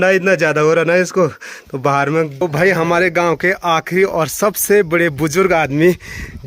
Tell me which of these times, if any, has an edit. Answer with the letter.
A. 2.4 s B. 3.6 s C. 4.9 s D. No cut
A